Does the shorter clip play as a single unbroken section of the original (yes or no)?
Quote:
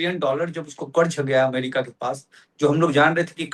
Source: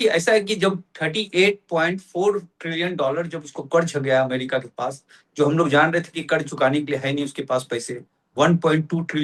yes